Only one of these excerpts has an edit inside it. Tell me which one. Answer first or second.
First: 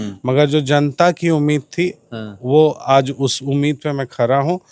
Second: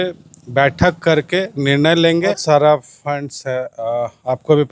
second